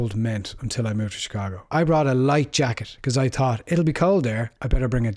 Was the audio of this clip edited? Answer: yes; 1 cut; at 1.6 s

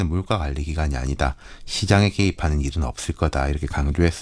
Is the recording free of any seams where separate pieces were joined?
yes; 0 cuts

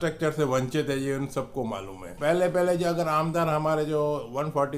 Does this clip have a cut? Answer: yes; 1 cut; at 2.2 s

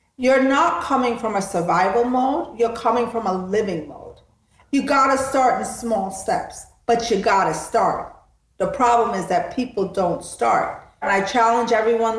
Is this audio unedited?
no; 2 cuts; at 4.5 s, 11.1 s

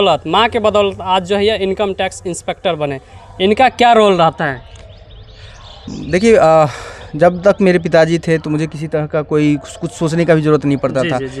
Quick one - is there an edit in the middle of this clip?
no; 0 cuts

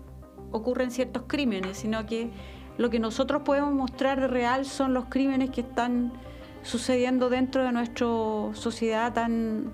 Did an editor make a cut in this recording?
no; 0 cuts

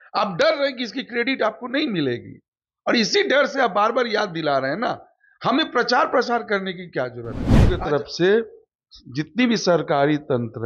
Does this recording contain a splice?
yes; 1 cut; at 7.7 s

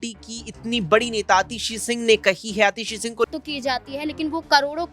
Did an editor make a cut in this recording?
yes; 1 cut; at 3.3 s

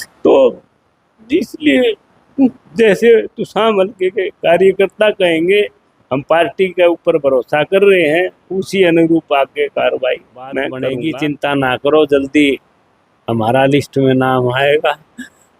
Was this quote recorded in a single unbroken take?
no; 1 cut; at 10.9 s

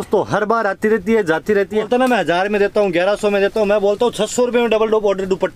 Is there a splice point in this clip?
yes; 1 cut; at 1.7 s

